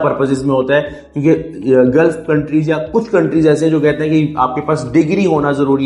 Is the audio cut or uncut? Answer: uncut